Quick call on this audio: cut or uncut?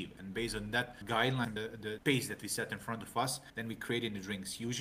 uncut